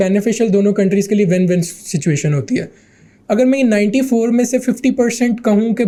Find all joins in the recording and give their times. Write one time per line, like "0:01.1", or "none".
none